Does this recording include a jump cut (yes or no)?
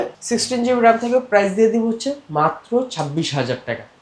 no